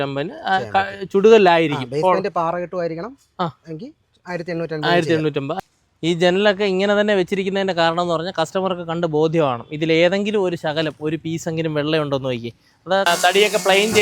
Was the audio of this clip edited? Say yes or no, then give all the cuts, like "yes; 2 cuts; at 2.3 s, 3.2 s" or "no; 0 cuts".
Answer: yes; 2 cuts; at 5.5 s, 13.1 s